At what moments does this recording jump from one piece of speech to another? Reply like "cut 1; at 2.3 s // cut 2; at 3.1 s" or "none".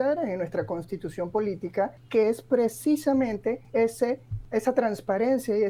cut 1; at 2.0 s // cut 2; at 3.6 s // cut 3; at 4.3 s